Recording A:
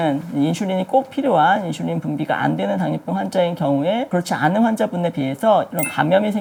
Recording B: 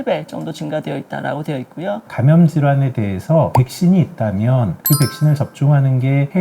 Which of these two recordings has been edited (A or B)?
B